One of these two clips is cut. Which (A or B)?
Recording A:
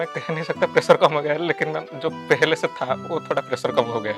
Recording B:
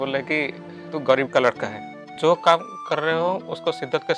B